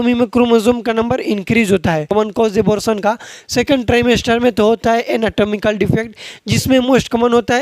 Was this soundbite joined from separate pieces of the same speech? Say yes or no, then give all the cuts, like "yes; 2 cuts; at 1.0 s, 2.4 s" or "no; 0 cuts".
yes; 1 cut; at 2.1 s